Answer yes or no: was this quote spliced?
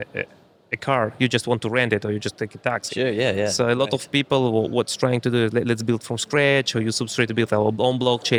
no